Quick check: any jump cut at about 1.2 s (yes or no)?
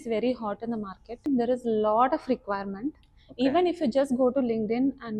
yes